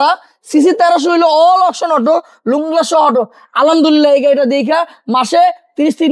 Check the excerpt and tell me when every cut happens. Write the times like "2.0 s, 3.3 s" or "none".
none